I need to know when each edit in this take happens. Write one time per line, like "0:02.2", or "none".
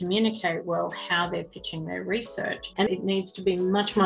0:02.8